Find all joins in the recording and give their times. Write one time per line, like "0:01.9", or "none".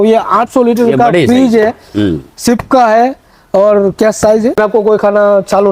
0:04.6